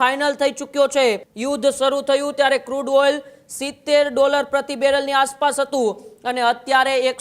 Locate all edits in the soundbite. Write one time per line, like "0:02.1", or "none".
0:01.3

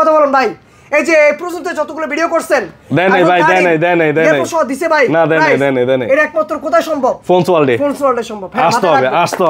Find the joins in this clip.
none

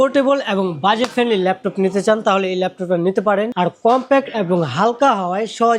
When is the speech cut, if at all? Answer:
0:03.5

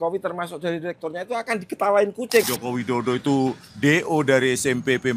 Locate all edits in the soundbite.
0:02.5

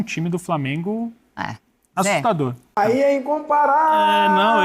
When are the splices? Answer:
0:02.7

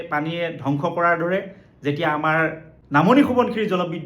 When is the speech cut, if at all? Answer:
0:02.7

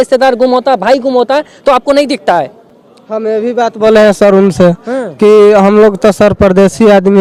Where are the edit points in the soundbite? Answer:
none

